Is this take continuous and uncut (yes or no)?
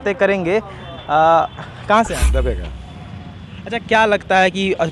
no